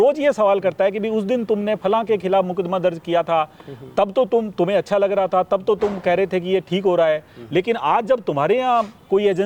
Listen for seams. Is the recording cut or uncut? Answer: uncut